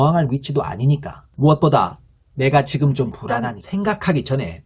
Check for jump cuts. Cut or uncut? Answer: cut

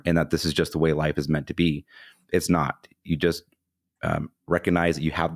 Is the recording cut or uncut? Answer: uncut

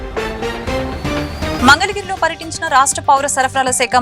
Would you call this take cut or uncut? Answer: cut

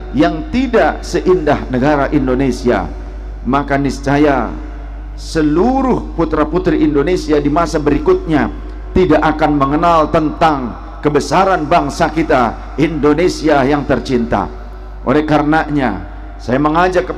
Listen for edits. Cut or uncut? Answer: uncut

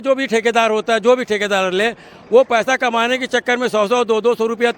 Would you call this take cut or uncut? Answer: uncut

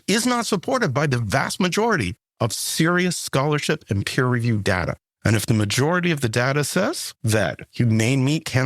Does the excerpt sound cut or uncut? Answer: cut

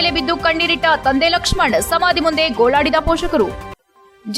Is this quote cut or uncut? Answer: uncut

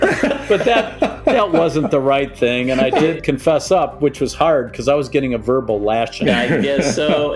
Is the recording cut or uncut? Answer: cut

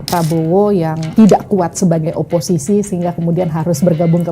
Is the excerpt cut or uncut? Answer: cut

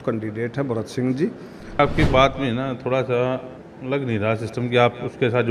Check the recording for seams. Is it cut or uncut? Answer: cut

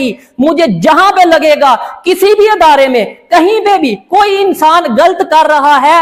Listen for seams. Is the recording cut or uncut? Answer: uncut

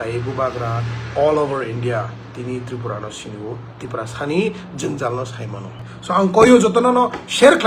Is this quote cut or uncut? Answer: cut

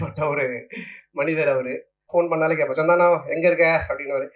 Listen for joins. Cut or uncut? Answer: cut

